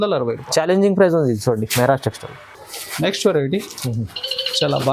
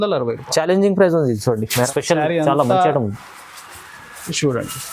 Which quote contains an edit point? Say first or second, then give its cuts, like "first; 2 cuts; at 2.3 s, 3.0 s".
second; 1 cut; at 1.9 s